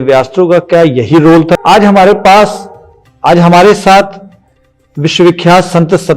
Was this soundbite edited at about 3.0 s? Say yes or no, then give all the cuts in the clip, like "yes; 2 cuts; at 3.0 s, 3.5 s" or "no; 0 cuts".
no; 1 cut; at 1.5 s